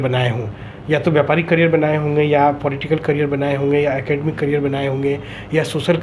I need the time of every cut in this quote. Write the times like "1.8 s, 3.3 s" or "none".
none